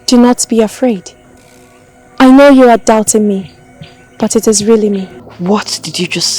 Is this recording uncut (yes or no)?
no